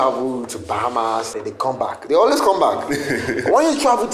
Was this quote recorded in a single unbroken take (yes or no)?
no